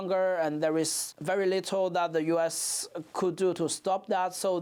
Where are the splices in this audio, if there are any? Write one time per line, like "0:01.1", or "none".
none